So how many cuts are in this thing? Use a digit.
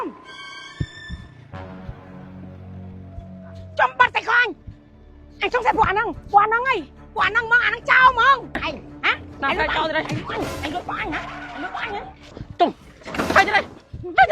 1